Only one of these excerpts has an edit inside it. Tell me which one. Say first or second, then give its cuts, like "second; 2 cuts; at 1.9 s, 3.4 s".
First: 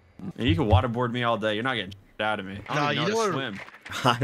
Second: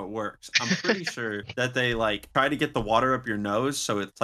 second; 1 cut; at 2.2 s